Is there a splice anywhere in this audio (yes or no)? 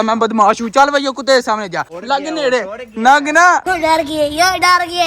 yes